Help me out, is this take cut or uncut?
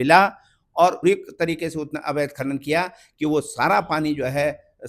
cut